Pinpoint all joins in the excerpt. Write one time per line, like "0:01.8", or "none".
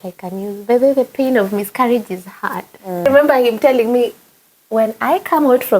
0:03.0